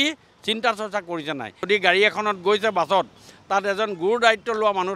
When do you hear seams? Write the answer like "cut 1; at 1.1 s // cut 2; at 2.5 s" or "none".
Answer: cut 1; at 1.7 s